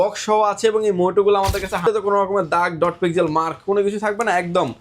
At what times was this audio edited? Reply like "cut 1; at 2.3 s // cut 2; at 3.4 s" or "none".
cut 1; at 1.8 s